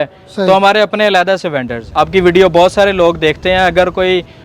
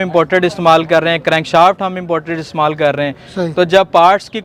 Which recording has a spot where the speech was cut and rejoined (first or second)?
first